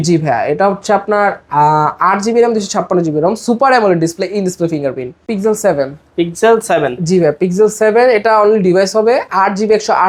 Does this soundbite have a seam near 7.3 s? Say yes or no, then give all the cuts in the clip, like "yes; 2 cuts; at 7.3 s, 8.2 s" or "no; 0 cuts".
no; 1 cut; at 5.3 s